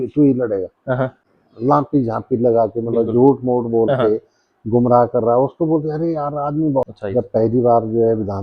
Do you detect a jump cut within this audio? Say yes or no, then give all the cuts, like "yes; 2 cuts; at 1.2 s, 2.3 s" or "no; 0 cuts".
yes; 2 cuts; at 1.2 s, 6.9 s